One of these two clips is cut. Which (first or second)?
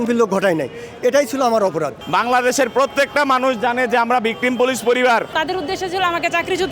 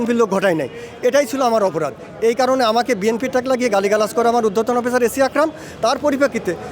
first